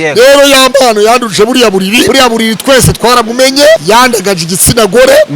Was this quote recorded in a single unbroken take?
no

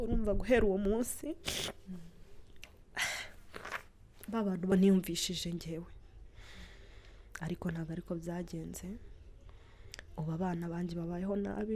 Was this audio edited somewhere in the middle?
yes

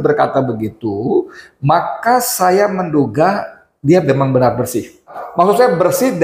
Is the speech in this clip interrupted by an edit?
yes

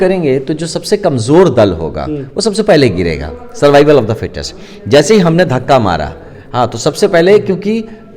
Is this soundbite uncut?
yes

